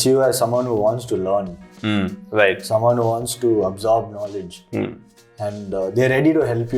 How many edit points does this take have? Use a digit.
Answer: 0